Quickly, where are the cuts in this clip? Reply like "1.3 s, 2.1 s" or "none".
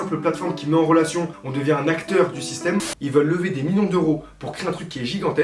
1.4 s, 2.9 s